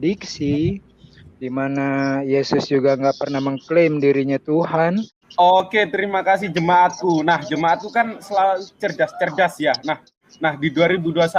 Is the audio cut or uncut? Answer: cut